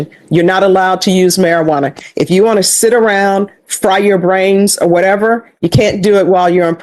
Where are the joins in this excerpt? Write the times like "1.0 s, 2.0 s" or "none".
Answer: none